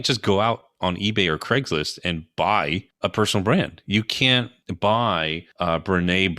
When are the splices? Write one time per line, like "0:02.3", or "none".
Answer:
0:02.6
0:04.6
0:05.4